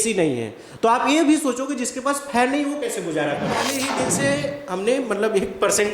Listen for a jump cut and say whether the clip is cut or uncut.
cut